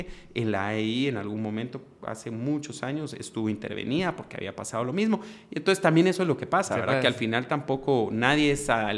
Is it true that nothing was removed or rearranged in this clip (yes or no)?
yes